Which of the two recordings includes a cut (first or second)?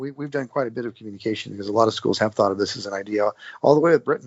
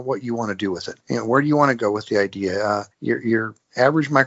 second